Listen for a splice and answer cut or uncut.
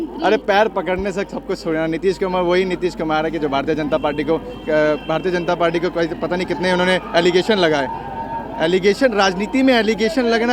uncut